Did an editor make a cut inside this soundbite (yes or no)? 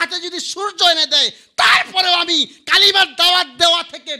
no